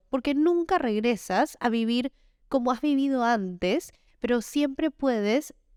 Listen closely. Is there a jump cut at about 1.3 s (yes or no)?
no